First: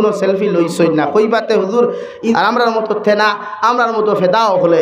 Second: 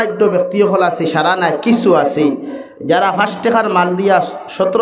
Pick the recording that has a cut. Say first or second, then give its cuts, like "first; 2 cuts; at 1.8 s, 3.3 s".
first; 1 cut; at 2.3 s